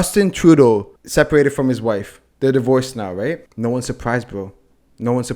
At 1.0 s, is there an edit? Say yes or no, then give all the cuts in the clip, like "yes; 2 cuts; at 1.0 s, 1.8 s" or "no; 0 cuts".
yes; 2 cuts; at 1.0 s, 3.5 s